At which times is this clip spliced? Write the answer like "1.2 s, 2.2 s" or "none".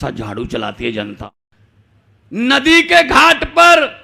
1.2 s